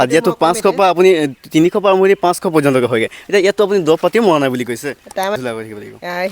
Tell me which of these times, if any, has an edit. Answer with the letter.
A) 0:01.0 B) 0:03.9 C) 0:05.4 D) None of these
C